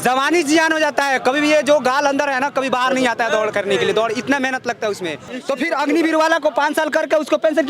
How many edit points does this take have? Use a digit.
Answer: 1